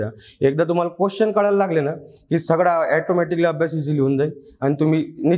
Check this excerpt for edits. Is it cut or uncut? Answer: uncut